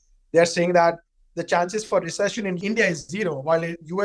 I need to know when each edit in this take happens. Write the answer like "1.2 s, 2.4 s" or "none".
2.6 s